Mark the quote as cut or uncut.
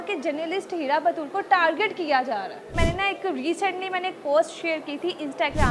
cut